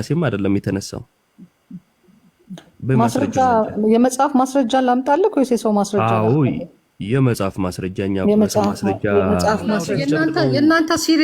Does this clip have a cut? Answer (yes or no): yes